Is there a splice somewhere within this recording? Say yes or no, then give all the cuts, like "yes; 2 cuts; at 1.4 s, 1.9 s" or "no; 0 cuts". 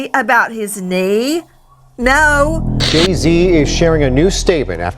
yes; 1 cut; at 2.7 s